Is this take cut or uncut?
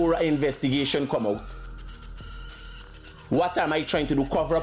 uncut